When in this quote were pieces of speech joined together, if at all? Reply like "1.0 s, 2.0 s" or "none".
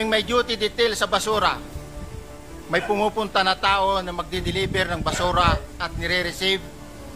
none